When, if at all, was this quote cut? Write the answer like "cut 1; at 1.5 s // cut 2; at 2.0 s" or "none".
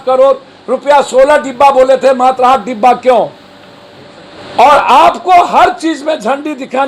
none